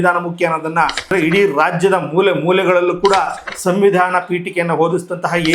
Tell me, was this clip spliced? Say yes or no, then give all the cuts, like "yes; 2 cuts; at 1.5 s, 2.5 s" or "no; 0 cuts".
yes; 1 cut; at 1.1 s